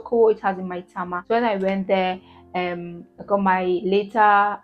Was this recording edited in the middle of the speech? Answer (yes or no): no